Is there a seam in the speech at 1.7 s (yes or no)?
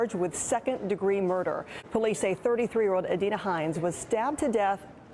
yes